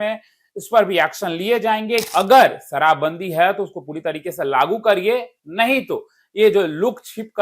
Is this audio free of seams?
no; 1 cut; at 2.1 s

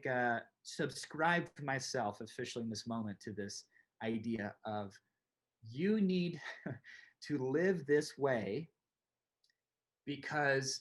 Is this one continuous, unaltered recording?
yes; 0 cuts

